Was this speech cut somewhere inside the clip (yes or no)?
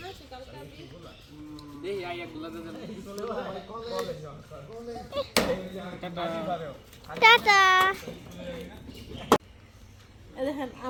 no